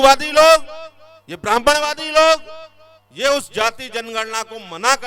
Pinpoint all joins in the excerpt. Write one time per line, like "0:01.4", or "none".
none